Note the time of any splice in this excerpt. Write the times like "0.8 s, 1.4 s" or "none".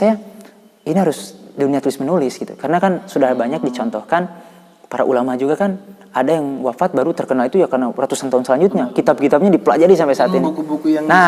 none